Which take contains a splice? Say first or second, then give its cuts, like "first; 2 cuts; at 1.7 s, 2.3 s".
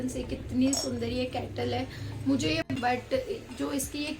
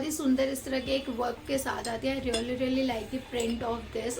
first; 1 cut; at 2.8 s